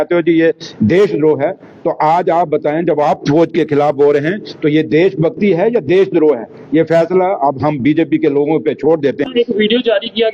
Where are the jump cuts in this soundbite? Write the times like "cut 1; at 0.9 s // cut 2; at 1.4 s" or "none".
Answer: cut 1; at 9.3 s